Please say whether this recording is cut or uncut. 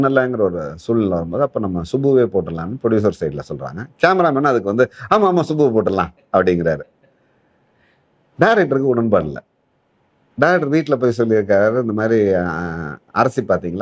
uncut